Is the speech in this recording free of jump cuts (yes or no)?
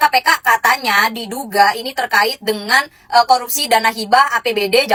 yes